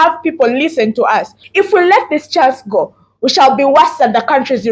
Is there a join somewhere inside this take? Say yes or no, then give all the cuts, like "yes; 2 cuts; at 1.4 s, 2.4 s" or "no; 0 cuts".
yes; 1 cut; at 1.4 s